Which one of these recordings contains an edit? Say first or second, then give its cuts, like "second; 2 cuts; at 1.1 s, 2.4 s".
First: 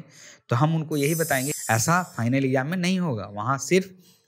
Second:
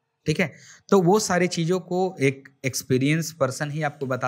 first; 1 cut; at 1.5 s